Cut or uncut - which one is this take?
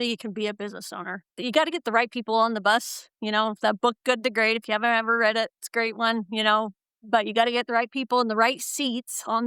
uncut